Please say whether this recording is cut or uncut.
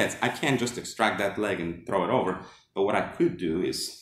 uncut